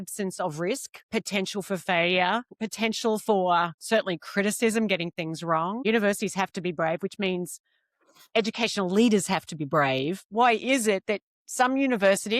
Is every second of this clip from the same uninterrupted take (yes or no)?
no